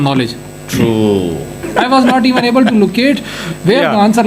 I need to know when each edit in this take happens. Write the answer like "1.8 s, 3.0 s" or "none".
1.7 s